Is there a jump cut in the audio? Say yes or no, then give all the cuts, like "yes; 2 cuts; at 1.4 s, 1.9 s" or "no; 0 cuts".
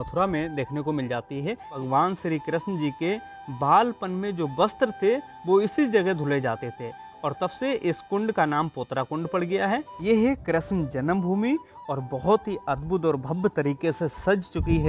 yes; 2 cuts; at 1.8 s, 9.9 s